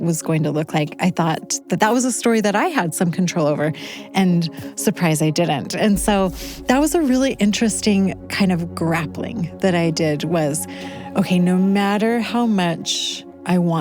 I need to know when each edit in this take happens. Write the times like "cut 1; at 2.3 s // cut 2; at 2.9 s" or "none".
cut 1; at 1.5 s